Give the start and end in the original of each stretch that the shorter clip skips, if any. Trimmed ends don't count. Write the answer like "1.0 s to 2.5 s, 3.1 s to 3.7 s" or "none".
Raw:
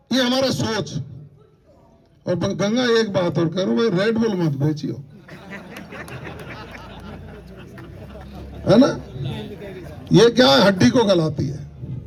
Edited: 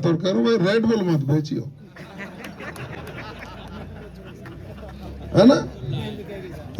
none